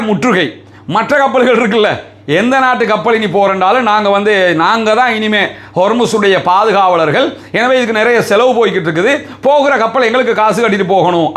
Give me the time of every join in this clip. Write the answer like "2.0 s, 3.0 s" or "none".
none